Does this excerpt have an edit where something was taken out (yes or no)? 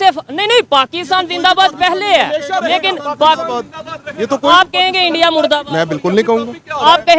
no